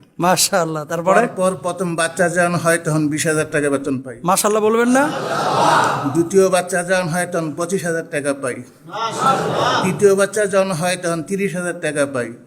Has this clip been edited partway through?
no; 0 cuts

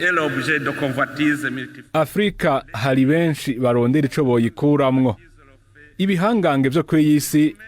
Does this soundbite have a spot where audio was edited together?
no; 0 cuts

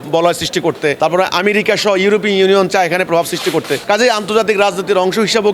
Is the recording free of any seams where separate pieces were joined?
no; 2 cuts; at 1.0 s, 3.8 s

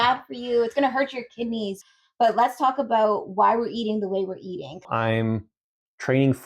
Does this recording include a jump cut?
yes; 2 cuts; at 1.8 s, 4.7 s

